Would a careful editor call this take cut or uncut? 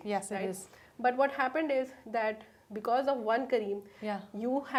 uncut